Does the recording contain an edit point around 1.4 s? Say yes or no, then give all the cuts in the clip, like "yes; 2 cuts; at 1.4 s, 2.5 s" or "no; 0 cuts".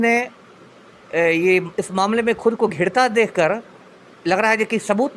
no; 0 cuts